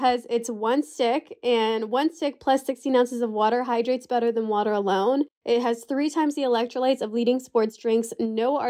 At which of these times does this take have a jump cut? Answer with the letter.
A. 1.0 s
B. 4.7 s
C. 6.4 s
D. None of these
D